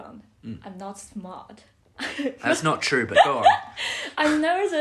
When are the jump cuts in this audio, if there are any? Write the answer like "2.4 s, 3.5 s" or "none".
none